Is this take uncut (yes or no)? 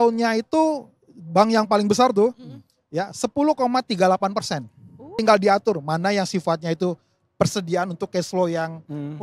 no